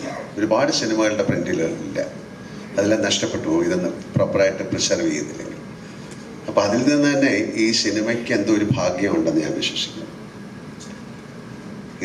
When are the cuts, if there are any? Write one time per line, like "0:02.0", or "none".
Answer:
none